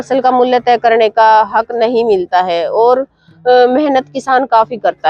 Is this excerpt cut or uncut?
uncut